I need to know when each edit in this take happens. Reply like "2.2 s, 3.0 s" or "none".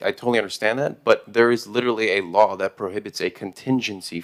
none

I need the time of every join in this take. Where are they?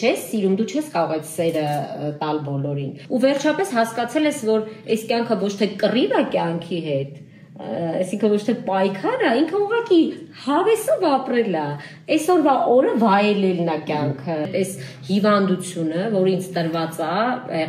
3.0 s, 14.5 s

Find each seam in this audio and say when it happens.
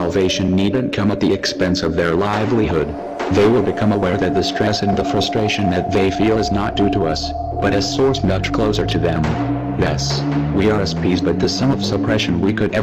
6.5 s

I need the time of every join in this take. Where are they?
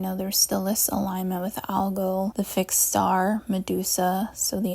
2.3 s

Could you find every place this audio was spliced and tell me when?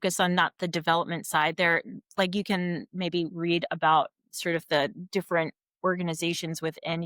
none

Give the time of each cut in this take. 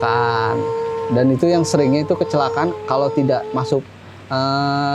none

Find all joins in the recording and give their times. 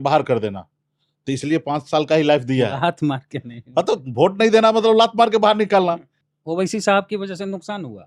6.2 s

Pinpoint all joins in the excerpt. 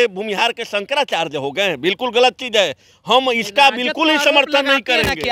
none

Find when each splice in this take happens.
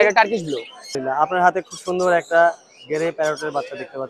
1.0 s

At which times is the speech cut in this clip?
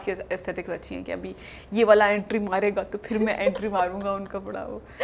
none

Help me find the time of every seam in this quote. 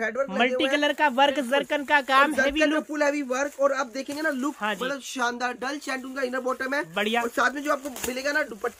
none

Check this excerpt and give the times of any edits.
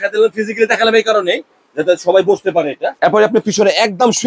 2.9 s

